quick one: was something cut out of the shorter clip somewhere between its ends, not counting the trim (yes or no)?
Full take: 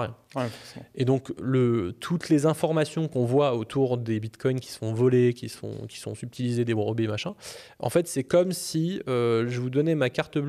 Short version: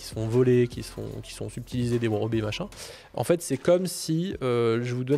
no